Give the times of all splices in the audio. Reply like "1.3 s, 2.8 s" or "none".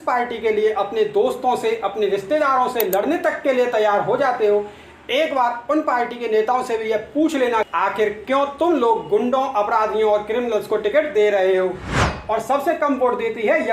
12.0 s